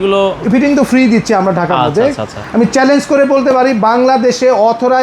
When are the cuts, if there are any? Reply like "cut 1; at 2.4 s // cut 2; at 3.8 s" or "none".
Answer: cut 1; at 2.3 s